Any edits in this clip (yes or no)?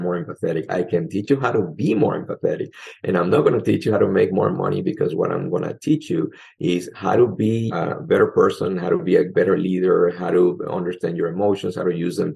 yes